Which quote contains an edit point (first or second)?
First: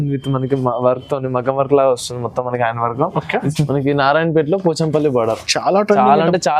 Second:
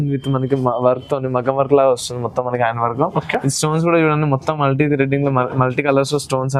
first